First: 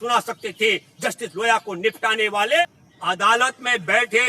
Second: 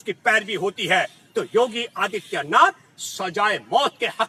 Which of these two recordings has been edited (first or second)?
first